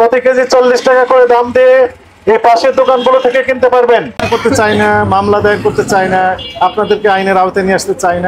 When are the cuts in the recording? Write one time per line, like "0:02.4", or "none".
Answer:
0:04.1